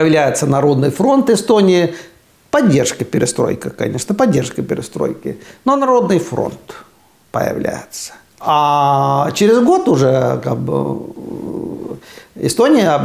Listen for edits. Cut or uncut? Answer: cut